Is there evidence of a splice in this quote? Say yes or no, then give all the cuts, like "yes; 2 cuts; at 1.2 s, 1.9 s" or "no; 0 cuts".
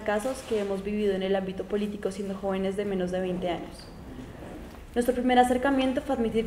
no; 0 cuts